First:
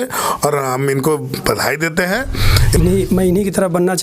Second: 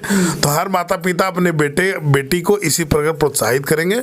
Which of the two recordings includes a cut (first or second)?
first